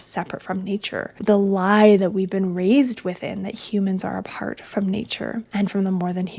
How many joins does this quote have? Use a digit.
2